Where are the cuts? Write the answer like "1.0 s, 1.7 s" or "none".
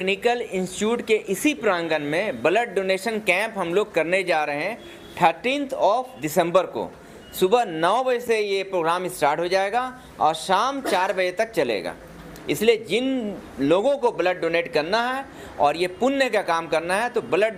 none

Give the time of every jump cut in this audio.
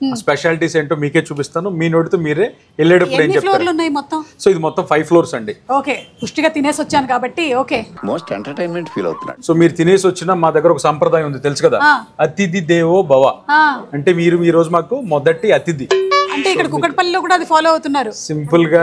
none

